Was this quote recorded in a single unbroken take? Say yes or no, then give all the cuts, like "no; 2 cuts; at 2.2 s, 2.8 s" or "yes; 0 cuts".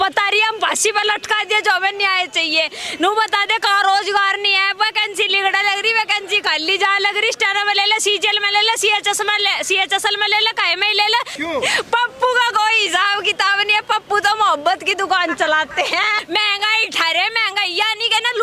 no; 2 cuts; at 11.4 s, 16.1 s